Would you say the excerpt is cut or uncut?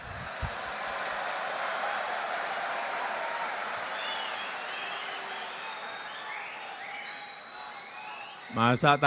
uncut